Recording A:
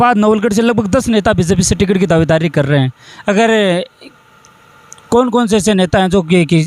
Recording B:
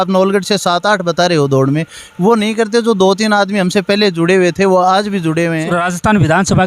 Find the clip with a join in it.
B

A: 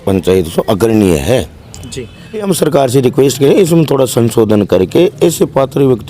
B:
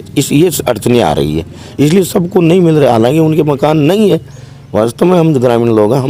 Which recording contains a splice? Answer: A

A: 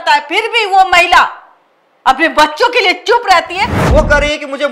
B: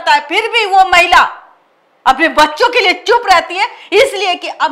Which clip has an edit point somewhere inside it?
A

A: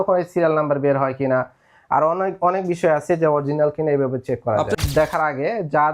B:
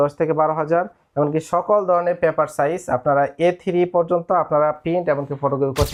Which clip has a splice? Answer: A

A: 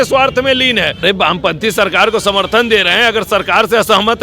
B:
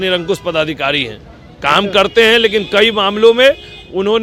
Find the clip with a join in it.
A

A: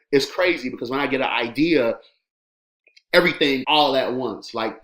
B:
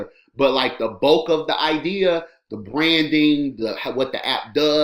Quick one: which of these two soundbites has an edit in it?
A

